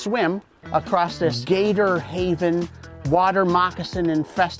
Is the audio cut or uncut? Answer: cut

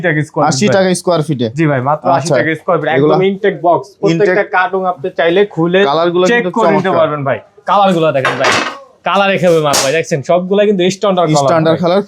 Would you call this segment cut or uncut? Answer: uncut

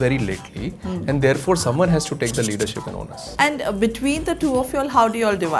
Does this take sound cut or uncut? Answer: cut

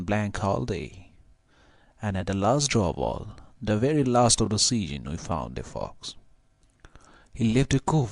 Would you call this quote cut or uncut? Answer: uncut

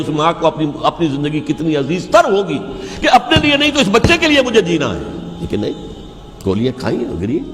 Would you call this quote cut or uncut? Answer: uncut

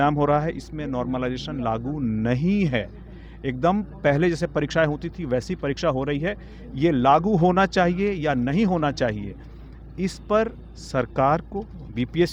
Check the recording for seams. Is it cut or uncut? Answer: uncut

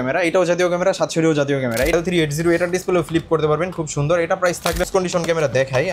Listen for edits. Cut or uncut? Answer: cut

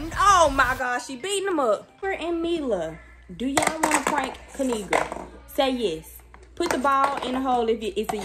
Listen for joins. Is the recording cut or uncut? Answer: cut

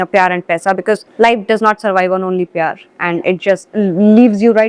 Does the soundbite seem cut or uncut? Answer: cut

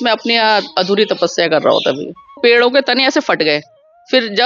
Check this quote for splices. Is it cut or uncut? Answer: cut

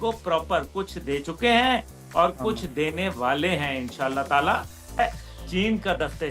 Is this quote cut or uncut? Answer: cut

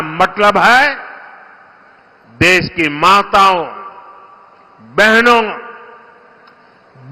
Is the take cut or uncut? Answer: uncut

